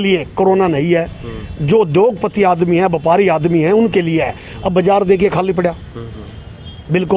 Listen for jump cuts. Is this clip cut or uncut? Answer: uncut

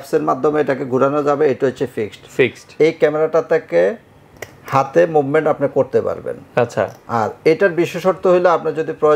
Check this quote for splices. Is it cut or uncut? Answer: uncut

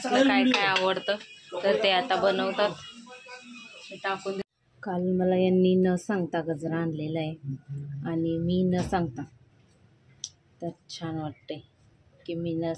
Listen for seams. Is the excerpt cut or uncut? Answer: cut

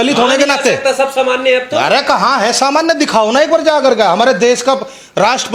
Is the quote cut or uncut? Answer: uncut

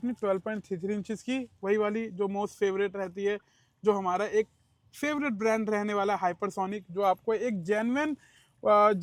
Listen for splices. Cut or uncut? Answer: uncut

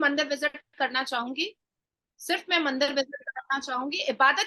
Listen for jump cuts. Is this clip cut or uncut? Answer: uncut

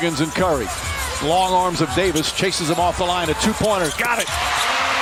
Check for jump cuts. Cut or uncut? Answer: uncut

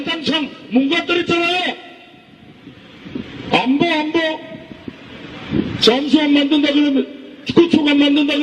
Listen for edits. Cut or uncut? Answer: cut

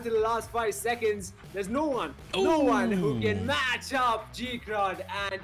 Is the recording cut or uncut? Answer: uncut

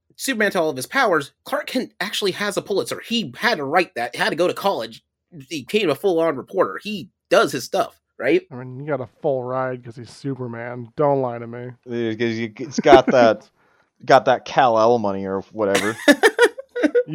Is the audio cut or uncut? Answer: uncut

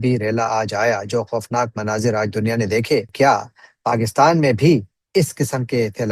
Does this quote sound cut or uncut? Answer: cut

